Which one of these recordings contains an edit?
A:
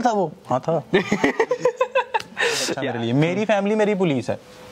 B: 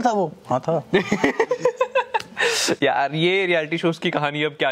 A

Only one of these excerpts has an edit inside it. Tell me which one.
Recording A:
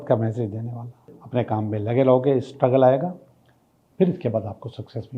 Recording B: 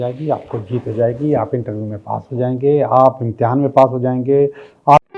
A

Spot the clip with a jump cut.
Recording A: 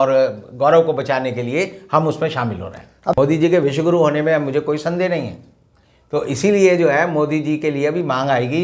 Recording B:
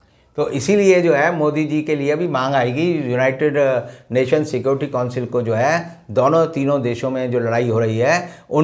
A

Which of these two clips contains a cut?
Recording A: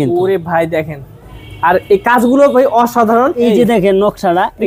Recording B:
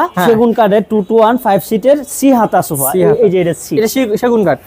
A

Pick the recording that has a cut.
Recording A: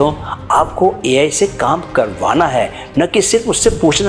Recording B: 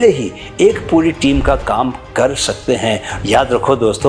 B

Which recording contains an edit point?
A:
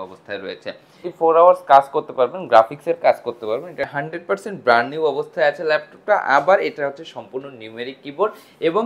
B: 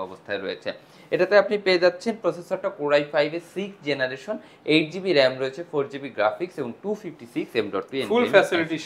A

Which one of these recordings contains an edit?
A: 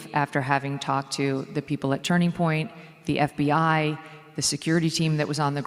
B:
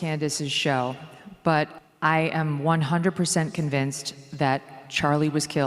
B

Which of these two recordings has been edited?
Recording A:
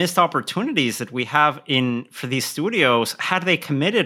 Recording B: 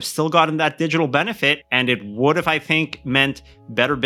B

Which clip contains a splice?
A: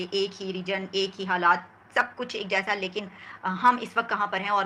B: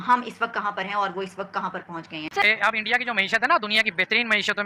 B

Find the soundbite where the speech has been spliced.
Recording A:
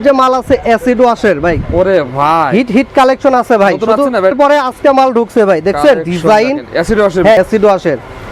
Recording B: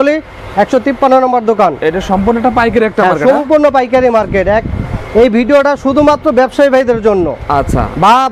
A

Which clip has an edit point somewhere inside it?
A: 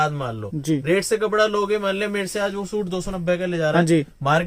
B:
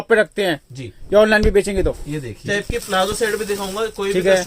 B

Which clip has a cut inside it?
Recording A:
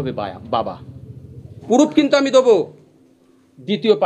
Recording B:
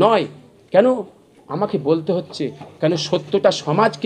A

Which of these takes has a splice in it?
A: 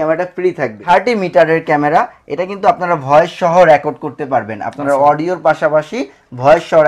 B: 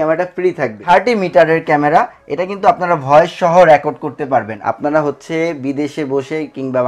B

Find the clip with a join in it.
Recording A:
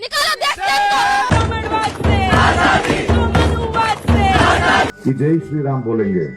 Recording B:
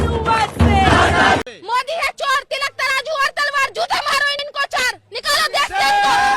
B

